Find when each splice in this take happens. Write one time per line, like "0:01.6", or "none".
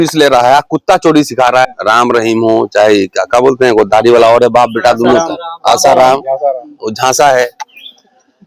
0:01.8